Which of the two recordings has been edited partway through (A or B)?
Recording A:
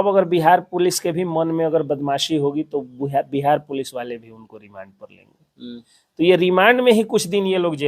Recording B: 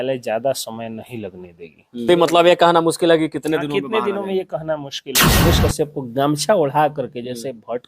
B